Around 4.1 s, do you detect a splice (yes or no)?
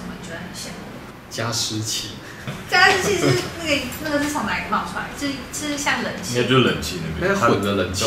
no